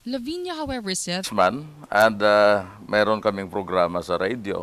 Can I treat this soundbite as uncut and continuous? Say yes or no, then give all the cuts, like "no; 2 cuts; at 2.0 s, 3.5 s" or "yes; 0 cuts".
yes; 0 cuts